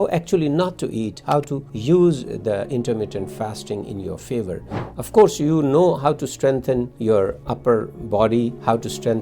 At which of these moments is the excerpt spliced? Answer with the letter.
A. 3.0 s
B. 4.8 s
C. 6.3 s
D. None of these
B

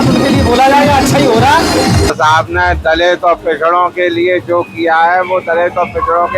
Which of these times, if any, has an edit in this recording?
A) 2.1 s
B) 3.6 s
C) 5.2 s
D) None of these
A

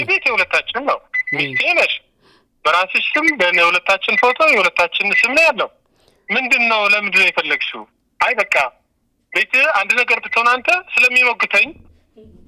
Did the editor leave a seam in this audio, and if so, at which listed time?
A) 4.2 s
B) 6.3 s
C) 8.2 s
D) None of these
D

